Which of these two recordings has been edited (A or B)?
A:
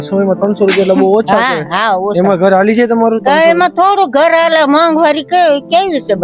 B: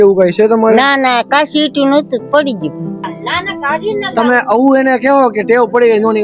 B